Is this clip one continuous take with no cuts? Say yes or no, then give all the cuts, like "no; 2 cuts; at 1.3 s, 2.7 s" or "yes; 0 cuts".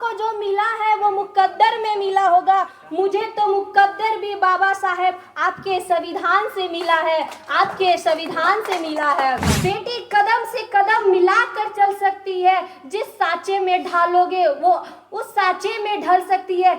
no; 1 cut; at 9.5 s